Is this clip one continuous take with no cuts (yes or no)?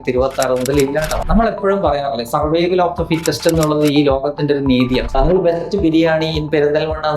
no